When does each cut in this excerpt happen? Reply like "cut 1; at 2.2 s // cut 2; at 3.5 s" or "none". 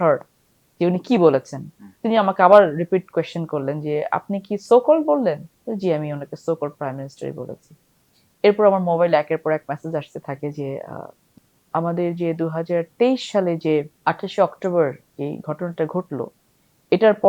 cut 1; at 5.5 s // cut 2; at 11.3 s // cut 3; at 13.9 s